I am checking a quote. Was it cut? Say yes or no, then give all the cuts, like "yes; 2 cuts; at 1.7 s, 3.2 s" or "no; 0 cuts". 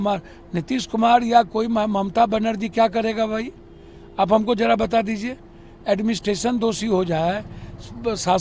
no; 0 cuts